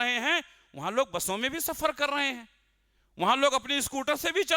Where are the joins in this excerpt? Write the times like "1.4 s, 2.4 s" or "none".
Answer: none